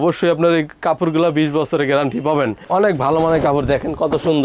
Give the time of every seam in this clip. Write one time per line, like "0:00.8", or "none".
0:02.6